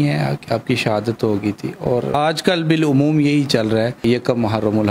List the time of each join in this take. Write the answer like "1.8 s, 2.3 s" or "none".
none

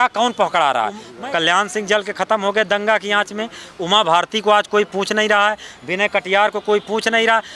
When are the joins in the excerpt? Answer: 1.1 s

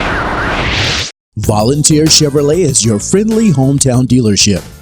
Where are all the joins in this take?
1.3 s

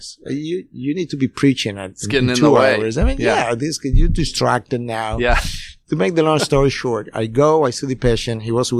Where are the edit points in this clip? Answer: none

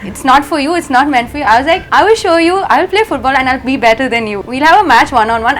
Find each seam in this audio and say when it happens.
1.8 s, 4.4 s

